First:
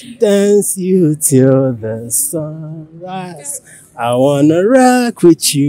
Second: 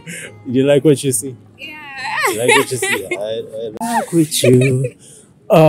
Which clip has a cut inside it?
second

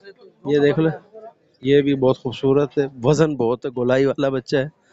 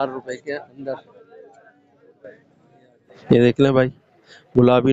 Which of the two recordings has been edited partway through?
second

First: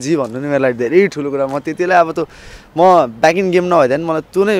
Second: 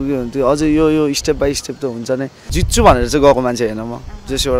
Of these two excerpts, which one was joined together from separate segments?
second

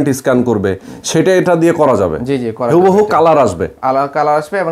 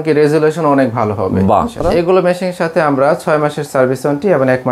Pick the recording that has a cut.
second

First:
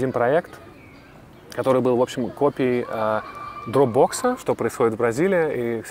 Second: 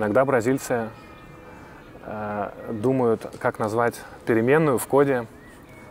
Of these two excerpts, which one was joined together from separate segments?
first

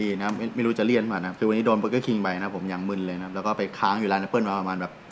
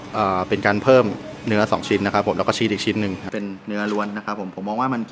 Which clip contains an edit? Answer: second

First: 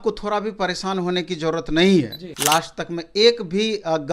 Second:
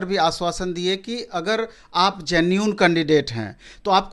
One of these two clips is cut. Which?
first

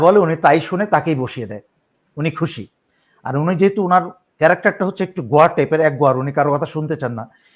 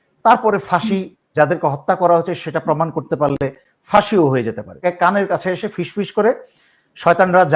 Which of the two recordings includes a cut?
second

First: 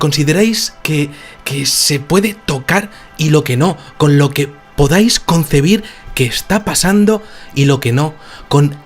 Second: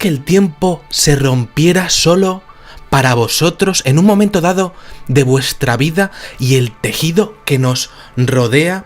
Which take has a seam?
first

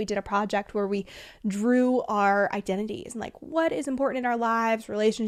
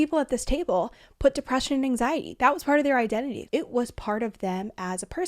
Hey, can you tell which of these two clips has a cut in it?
second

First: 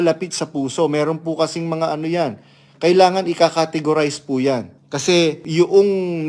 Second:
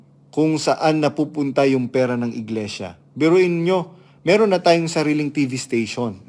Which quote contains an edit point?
first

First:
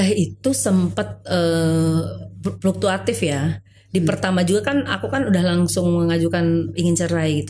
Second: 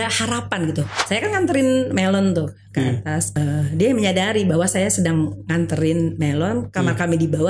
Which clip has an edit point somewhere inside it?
second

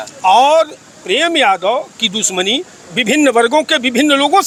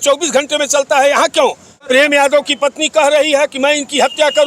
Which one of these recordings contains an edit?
second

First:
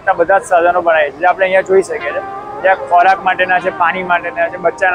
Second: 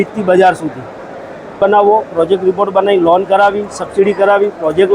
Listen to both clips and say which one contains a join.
second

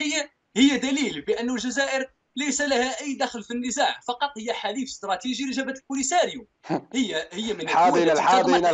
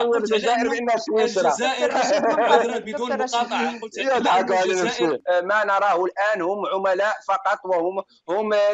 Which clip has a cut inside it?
second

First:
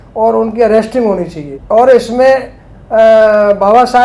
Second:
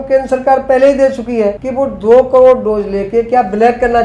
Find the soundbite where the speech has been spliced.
second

